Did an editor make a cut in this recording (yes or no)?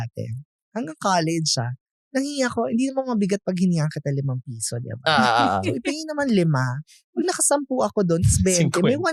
no